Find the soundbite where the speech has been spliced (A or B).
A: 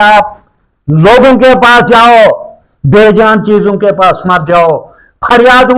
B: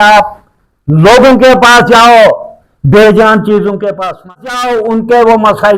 B